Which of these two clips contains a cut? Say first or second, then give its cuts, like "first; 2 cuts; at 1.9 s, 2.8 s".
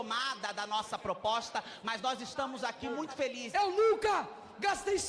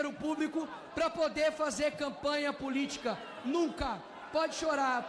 first; 1 cut; at 3.4 s